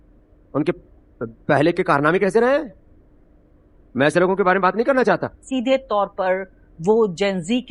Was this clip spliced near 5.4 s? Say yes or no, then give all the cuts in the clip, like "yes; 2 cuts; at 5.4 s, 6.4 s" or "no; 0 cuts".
yes; 1 cut; at 5.4 s